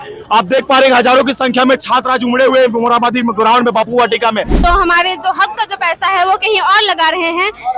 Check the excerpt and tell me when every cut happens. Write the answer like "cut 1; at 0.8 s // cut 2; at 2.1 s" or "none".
cut 1; at 4.6 s